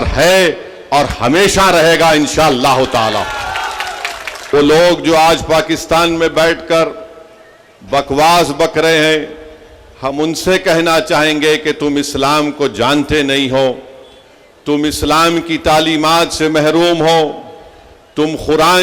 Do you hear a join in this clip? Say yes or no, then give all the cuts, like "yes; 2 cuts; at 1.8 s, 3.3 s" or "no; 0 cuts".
yes; 1 cut; at 4.5 s